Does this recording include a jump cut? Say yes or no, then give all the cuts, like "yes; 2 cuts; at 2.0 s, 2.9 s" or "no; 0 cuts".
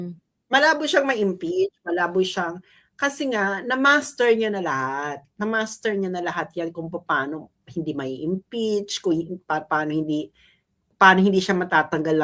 no; 0 cuts